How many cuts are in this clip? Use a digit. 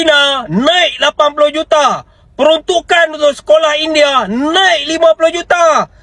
0